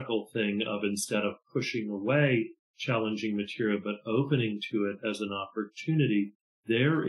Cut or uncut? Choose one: uncut